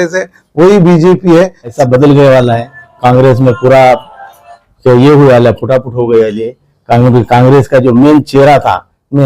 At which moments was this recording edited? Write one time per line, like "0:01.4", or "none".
0:01.7